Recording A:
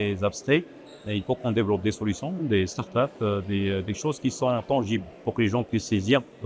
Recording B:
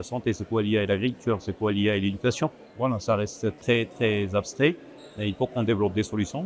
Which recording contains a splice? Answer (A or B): B